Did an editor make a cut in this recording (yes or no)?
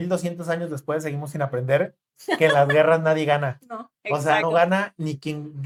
no